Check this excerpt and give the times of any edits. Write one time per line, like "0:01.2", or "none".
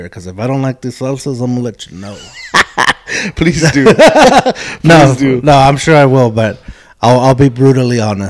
none